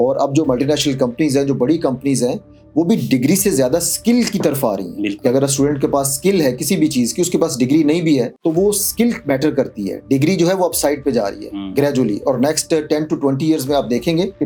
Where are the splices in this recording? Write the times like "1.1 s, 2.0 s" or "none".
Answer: none